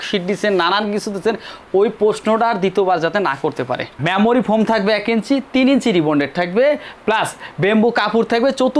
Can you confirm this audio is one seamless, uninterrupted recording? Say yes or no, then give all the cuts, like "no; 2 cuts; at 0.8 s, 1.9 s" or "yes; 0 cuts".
no; 1 cut; at 4.0 s